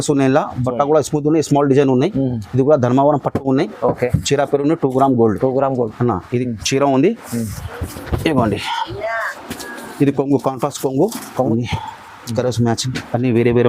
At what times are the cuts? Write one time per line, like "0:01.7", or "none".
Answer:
0:11.5